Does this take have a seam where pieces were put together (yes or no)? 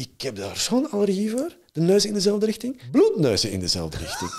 yes